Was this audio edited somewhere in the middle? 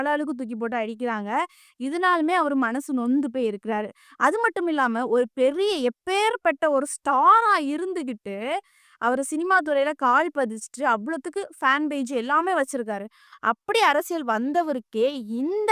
no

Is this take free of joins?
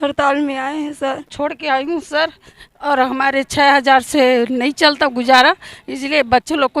no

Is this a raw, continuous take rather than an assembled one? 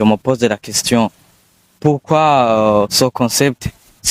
yes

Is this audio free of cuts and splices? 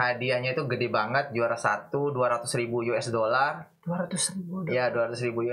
yes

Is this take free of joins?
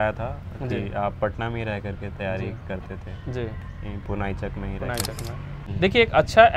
no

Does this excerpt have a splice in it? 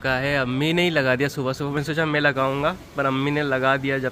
no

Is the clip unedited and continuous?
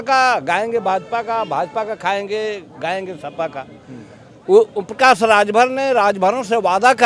yes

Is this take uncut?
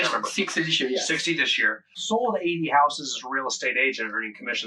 no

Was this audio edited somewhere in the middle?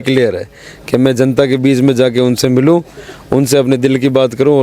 no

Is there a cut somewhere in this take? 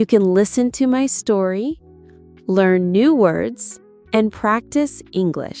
no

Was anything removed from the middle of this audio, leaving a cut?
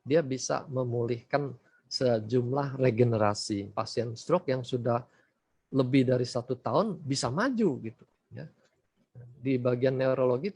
yes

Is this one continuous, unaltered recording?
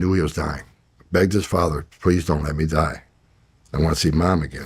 yes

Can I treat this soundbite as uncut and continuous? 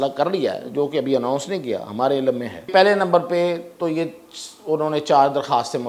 no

